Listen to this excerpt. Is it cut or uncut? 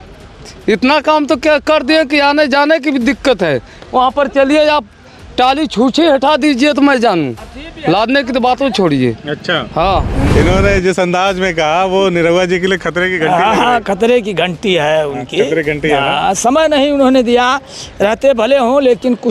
cut